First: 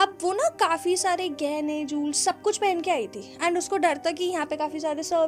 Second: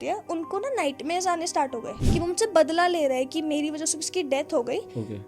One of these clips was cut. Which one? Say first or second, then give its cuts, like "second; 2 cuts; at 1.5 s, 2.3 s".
second; 1 cut; at 1.9 s